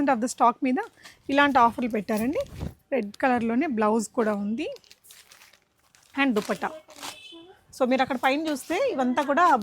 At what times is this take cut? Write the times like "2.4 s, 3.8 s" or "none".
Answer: none